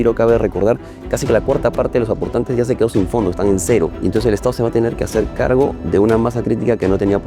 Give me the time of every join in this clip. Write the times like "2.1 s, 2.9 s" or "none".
1.0 s, 4.0 s